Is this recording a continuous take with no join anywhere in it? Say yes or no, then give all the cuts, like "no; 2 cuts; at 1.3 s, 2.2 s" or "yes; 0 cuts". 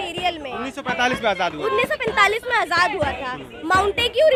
yes; 0 cuts